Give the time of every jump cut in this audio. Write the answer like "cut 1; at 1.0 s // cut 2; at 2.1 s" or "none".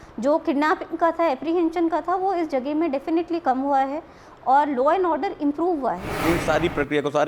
cut 1; at 6.2 s